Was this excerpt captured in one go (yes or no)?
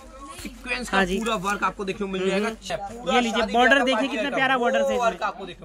no